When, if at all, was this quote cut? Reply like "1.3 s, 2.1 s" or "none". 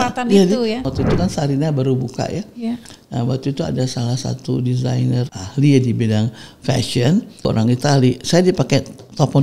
0.9 s, 5.3 s, 7.5 s